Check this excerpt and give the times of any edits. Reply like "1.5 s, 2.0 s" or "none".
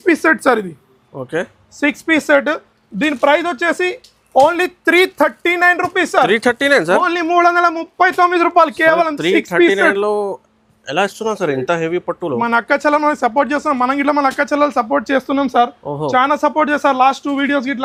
none